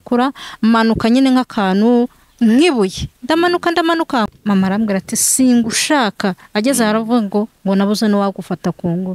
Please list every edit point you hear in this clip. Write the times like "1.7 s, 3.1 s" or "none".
4.3 s

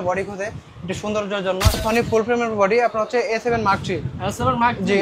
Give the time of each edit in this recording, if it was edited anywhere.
1.8 s

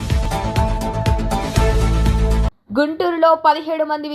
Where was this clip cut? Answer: 2.6 s

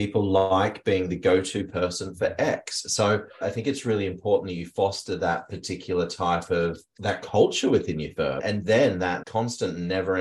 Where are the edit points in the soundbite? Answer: 3.4 s, 6.9 s, 8.4 s

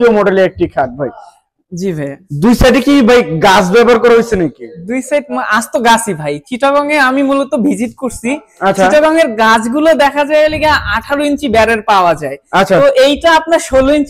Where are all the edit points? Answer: none

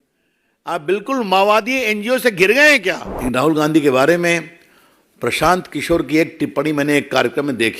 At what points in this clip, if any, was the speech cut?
3.1 s

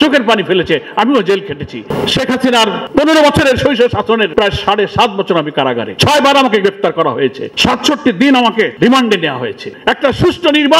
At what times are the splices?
1.9 s, 2.8 s, 4.3 s, 5.9 s, 7.5 s, 8.7 s, 9.7 s

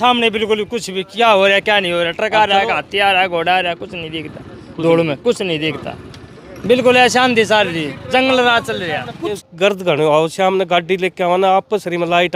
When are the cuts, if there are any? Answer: 9.4 s

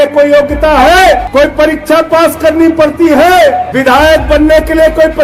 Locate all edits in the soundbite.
1.3 s, 3.7 s

